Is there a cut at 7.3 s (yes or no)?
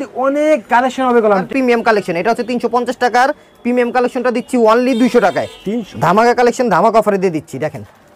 no